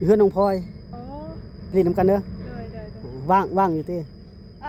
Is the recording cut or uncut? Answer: uncut